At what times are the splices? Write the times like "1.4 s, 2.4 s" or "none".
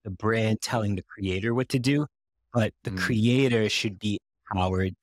none

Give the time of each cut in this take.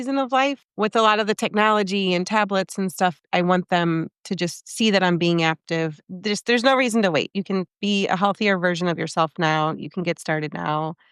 6.1 s

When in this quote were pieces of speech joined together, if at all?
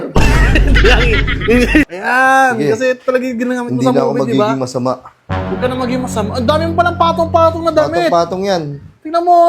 1.9 s

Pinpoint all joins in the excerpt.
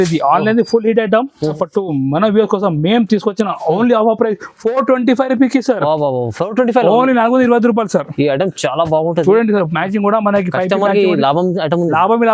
1.6 s

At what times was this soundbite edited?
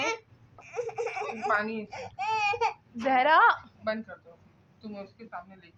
none

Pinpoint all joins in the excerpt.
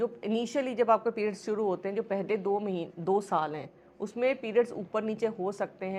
none

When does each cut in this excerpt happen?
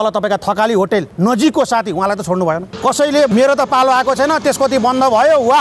1.1 s, 3.3 s

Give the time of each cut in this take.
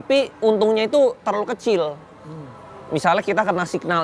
none

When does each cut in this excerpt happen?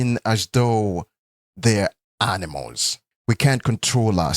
3.1 s

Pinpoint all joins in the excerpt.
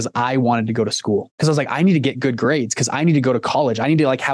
1.3 s

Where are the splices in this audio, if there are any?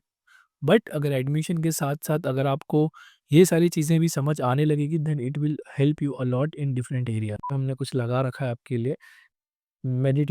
7.5 s

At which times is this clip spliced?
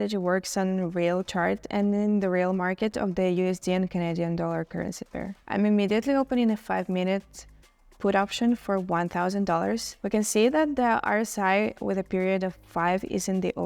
5.4 s, 9.9 s

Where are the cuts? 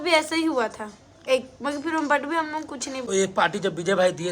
3.0 s

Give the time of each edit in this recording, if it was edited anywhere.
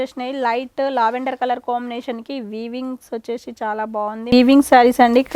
4.3 s

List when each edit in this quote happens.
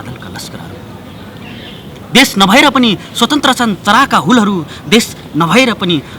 5.3 s

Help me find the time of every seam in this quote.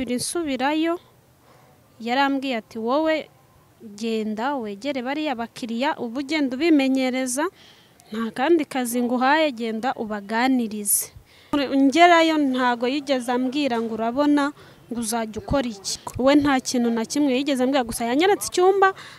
11.5 s, 16.0 s

